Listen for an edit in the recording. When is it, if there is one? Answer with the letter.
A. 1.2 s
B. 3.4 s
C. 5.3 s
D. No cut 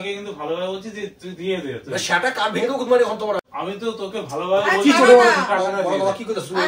B